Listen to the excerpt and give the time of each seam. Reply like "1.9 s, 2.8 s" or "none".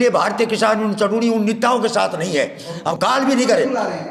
none

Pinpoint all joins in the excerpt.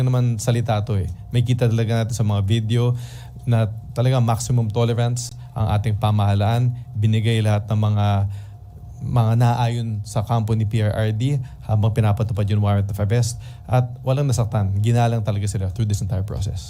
none

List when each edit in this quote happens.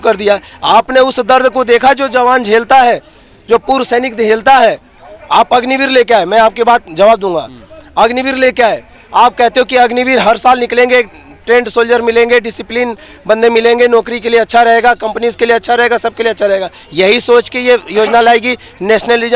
none

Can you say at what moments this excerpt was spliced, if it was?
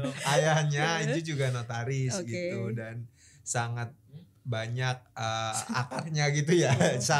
none

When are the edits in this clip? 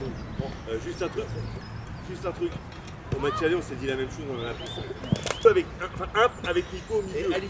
5.4 s

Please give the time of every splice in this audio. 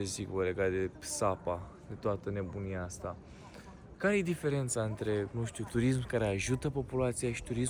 none

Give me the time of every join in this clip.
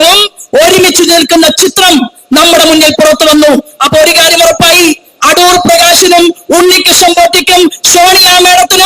none

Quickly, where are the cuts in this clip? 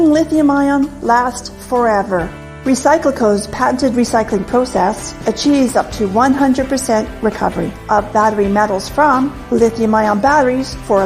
1.4 s

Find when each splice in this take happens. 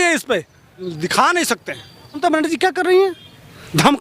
2.2 s

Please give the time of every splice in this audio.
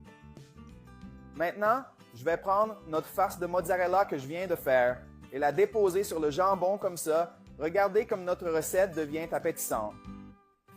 1.1 s

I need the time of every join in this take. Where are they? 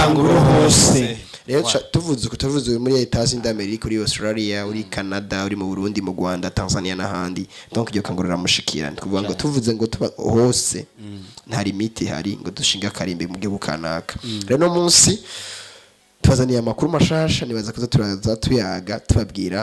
none

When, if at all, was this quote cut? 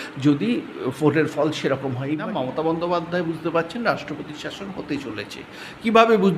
2.2 s

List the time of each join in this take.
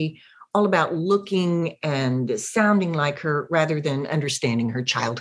none

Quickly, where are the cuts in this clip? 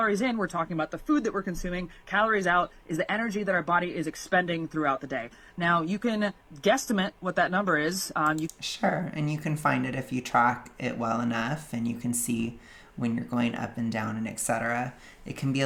none

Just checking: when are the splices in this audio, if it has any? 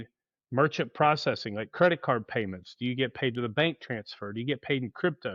none

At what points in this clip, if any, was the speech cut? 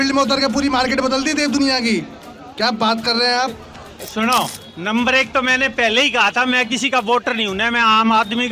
4.0 s

